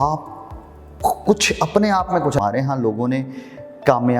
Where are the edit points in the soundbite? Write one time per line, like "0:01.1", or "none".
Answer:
0:02.4